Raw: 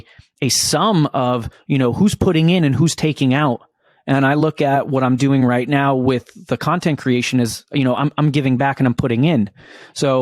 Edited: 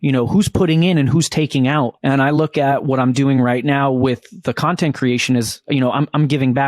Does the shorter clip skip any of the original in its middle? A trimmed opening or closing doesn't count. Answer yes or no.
yes